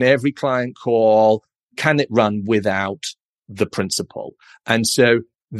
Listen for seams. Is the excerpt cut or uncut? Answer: uncut